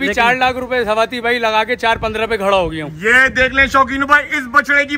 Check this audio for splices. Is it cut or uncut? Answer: uncut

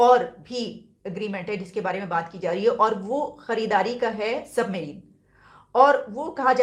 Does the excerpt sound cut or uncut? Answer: uncut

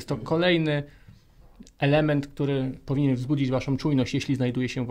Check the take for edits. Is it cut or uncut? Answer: uncut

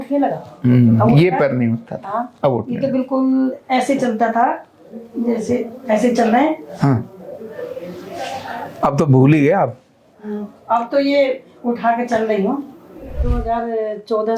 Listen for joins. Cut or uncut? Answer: cut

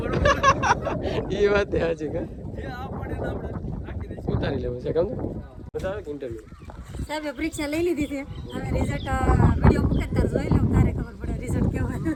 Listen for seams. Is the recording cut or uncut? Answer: uncut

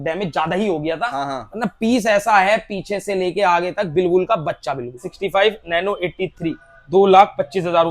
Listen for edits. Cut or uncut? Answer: cut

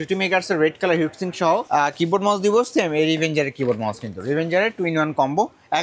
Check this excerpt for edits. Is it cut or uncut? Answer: cut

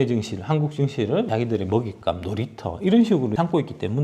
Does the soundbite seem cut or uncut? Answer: cut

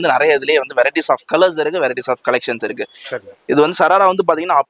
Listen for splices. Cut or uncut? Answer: uncut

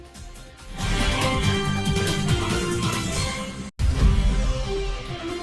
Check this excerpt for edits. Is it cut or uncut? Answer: cut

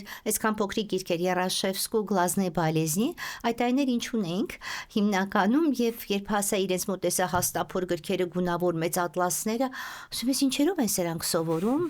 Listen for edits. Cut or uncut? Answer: uncut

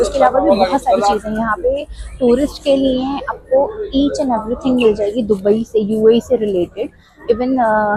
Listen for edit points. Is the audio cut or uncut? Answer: uncut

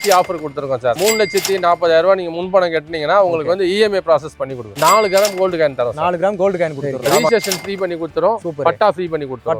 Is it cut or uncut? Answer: cut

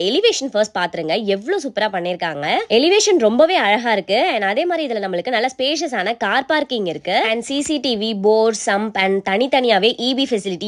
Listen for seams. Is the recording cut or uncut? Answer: uncut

